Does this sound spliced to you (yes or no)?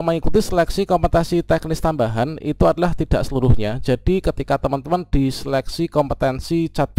no